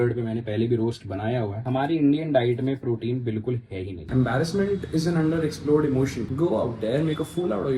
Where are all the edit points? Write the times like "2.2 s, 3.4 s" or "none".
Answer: 1.6 s, 4.0 s

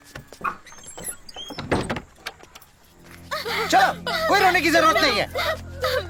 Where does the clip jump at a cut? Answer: none

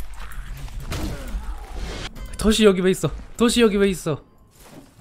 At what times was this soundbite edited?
2.1 s

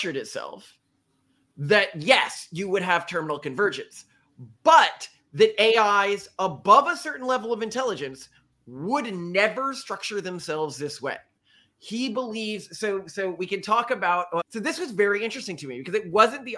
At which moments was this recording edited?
none

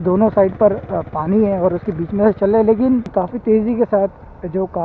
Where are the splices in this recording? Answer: 3.1 s

